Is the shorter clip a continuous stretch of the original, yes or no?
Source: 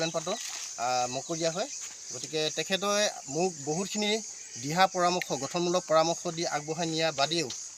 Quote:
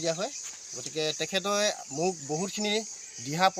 yes